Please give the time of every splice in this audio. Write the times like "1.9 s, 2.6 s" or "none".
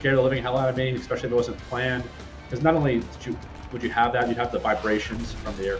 none